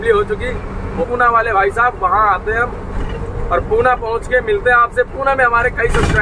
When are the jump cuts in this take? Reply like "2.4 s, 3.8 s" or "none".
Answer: 1.0 s